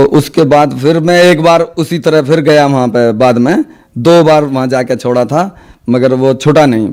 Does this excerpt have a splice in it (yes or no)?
no